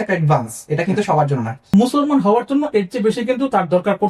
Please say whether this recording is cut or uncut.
cut